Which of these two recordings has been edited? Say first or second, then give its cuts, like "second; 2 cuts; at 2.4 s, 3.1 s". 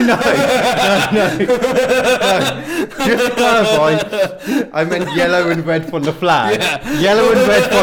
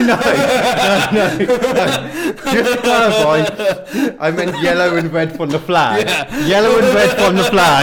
second; 1 cut; at 1.8 s